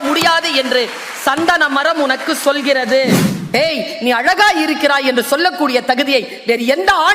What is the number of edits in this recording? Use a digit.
1